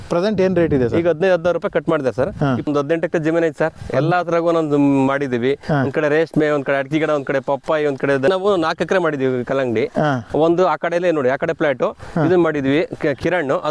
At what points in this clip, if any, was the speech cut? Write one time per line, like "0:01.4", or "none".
0:02.7
0:08.3